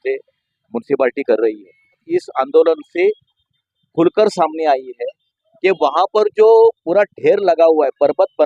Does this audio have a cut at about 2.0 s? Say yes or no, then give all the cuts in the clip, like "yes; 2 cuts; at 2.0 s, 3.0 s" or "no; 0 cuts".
yes; 1 cut; at 2.0 s